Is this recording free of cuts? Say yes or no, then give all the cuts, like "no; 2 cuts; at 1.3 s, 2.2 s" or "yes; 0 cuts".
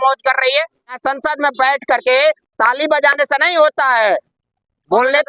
no; 1 cut; at 1.0 s